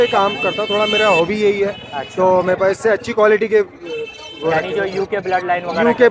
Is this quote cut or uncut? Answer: uncut